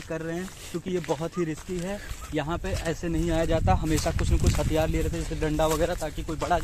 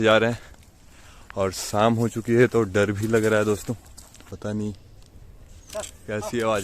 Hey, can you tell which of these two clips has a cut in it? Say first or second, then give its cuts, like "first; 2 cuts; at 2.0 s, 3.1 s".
second; 1 cut; at 4.4 s